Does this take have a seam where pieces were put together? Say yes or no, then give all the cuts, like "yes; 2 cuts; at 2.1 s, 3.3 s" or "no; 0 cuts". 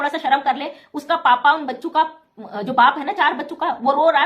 no; 0 cuts